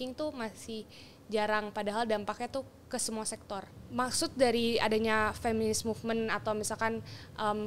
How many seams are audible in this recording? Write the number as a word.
one